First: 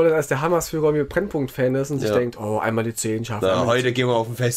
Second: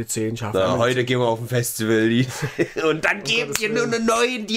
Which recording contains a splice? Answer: first; 1 cut; at 1.1 s

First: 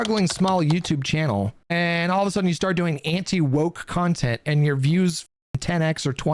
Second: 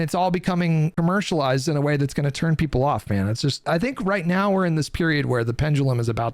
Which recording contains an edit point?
second; 2 cuts; at 0.9 s, 3.6 s

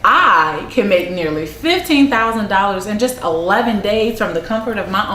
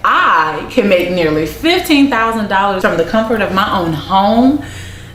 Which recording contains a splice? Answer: second; 1 cut; at 2.8 s

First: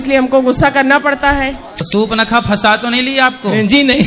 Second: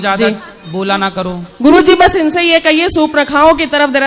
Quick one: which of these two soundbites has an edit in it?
first; 1 cut; at 1.8 s

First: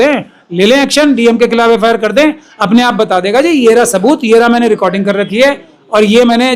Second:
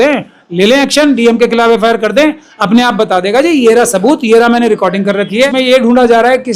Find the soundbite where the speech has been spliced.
second; 1 cut; at 5.5 s

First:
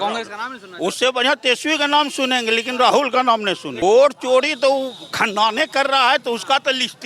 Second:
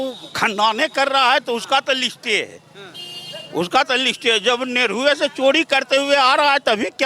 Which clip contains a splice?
first; 1 cut; at 3.8 s

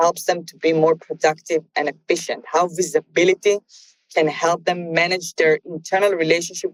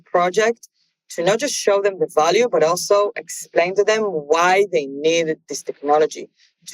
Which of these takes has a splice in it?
second; 1 cut; at 3.7 s

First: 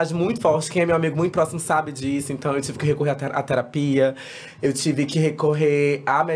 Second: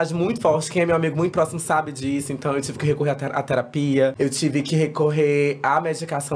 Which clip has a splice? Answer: second; 1 cut; at 4.1 s

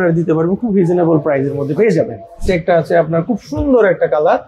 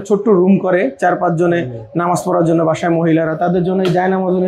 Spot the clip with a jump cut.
first; 1 cut; at 2.5 s

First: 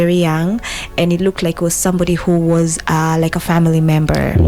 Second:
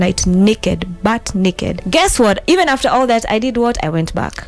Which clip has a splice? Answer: second; 1 cut; at 1.8 s

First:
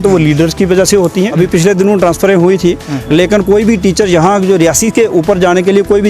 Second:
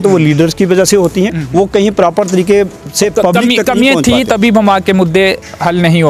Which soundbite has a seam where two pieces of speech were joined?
first; 1 cut; at 1.3 s

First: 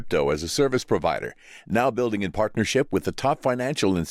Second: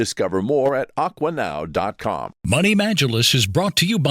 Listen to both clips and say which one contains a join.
second; 1 cut; at 2.3 s

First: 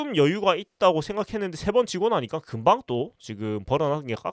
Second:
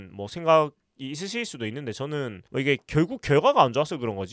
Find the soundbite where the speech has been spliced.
second; 1 cut; at 2.4 s

